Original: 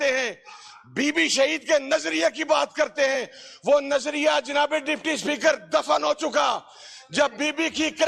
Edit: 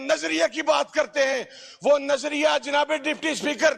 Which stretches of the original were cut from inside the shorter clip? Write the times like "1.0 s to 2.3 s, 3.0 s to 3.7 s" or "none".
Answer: none

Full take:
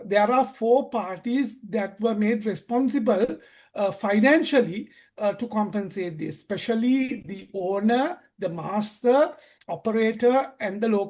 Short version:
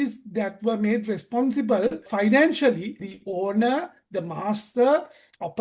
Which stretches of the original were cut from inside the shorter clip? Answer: 3.5 s to 4.0 s, 5.0 s to 7.3 s

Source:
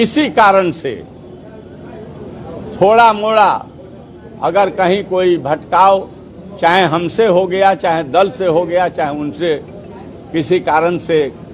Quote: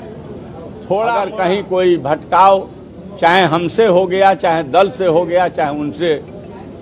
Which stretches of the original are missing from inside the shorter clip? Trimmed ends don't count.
3.1 s to 4.6 s

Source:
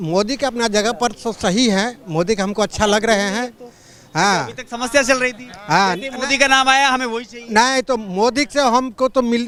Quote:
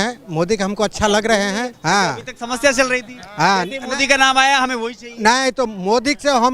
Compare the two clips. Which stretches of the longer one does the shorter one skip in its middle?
3.5 s to 4.0 s

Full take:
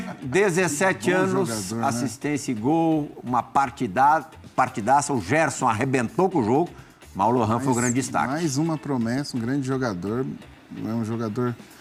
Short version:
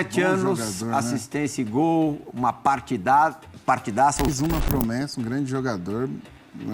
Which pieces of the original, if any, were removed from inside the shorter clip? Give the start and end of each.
5.2 s to 8.5 s

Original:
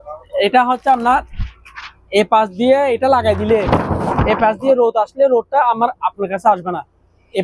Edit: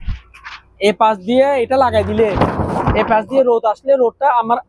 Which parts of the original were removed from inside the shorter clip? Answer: none

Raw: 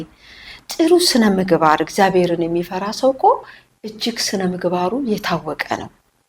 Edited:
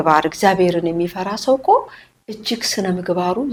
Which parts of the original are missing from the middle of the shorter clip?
none

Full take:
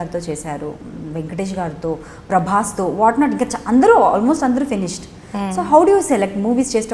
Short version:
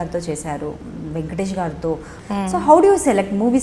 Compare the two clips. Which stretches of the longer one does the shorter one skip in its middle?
2.1 s to 5.1 s

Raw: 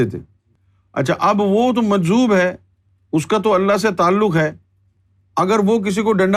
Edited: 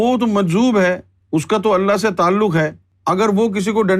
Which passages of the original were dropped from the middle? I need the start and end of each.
2.7 s to 2.9 s, 4.7 s to 5.2 s

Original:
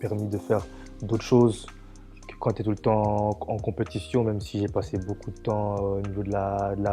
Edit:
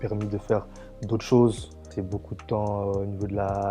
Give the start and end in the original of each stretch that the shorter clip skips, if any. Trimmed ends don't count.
2.0 s to 4.9 s

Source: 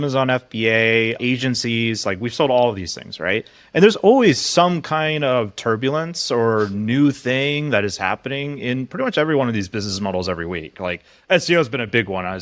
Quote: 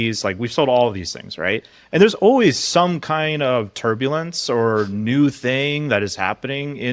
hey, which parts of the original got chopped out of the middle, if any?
none

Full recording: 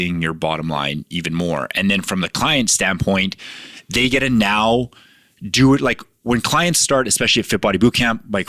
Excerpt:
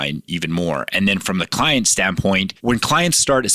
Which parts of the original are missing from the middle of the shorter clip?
3.3 s to 6.1 s

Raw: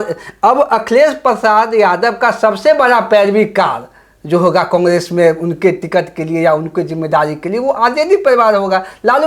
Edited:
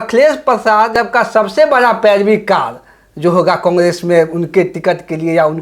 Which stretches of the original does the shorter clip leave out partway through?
1.7 s to 2.0 s

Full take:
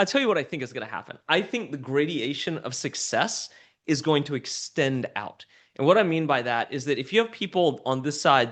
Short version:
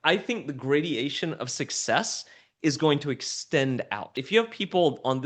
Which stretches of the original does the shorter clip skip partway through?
5.5 s to 7.0 s

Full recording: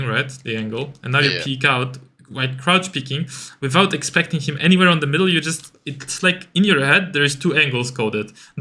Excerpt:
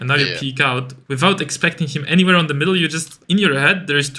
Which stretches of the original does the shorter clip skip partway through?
2.0 s to 3.5 s, 5.7 s to 6.4 s

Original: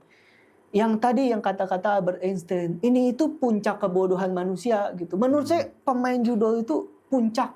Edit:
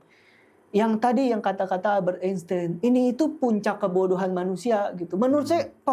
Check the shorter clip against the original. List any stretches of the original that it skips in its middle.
none

